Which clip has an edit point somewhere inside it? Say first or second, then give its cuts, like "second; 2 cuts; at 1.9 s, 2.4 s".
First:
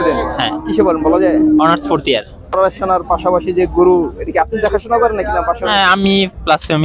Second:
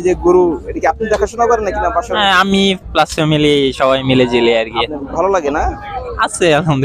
first; 1 cut; at 2.5 s